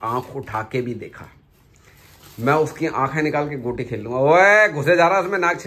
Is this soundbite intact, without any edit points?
yes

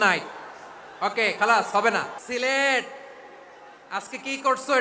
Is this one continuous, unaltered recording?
no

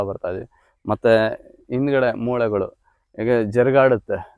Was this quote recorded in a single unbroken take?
yes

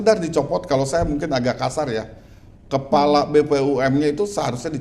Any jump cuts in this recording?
no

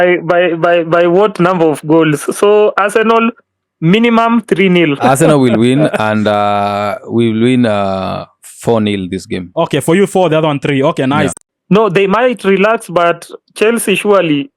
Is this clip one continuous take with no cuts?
no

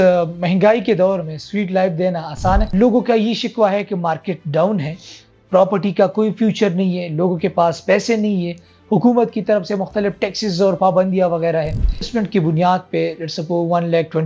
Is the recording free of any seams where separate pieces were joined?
no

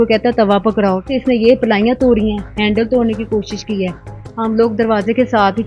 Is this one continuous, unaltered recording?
yes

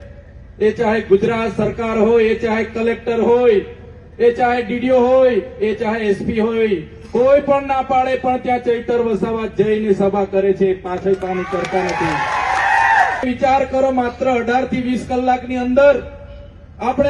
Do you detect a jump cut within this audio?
yes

